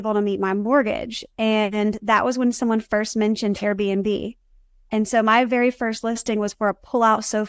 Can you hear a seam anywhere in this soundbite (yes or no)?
yes